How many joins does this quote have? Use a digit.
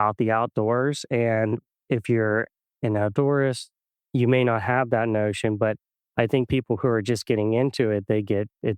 1